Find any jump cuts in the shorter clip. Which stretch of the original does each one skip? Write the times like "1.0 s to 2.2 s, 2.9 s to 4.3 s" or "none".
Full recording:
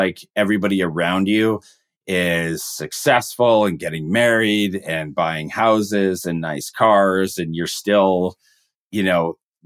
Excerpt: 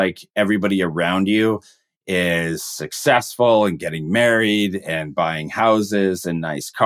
none